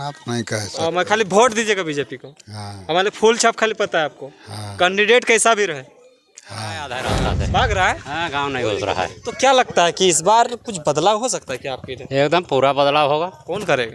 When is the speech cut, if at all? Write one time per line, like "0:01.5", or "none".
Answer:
0:07.1